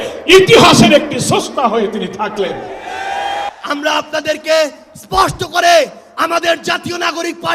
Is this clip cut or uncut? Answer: cut